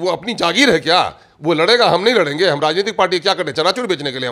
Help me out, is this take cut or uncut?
uncut